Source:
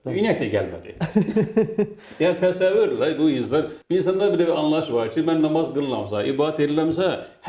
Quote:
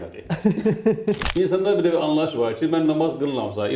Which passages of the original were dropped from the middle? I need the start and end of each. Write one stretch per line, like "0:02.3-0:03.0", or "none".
0:02.0-0:03.8